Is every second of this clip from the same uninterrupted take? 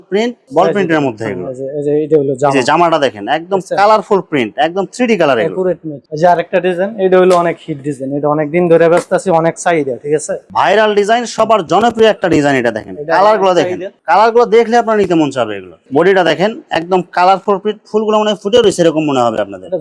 yes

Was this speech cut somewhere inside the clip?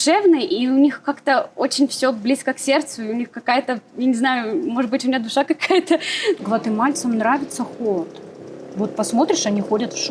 yes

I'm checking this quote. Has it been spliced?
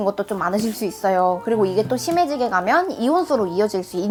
no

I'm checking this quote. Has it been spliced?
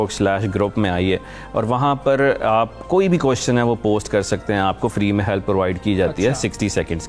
no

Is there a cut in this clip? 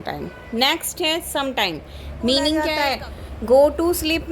yes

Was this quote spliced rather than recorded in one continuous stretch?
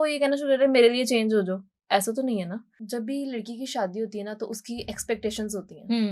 yes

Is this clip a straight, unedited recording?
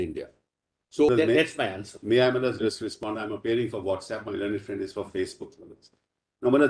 no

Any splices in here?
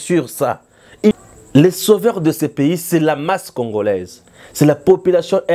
yes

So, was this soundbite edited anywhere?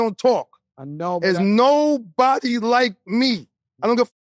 no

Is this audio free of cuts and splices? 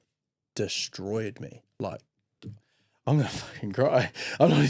yes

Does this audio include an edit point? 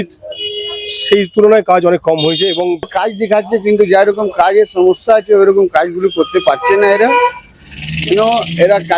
yes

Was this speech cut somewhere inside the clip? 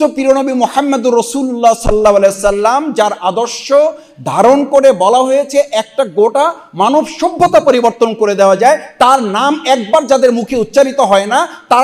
no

